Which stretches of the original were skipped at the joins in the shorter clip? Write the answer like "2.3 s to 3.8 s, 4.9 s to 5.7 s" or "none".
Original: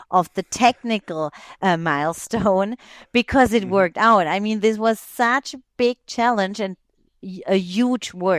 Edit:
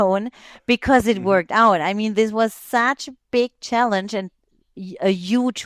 none